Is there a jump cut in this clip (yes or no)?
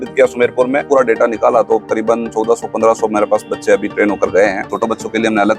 yes